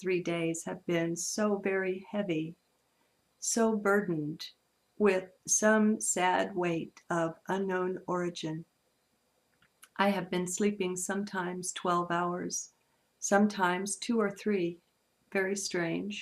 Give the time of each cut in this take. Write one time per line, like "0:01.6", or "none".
0:05.5